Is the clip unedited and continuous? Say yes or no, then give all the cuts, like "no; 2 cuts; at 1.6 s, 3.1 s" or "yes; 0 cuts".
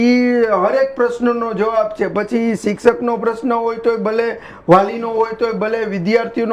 yes; 0 cuts